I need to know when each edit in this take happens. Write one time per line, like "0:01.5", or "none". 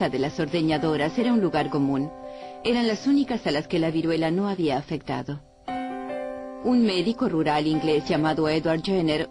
0:06.2